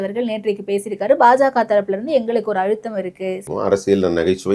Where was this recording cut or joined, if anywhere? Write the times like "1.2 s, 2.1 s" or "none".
3.4 s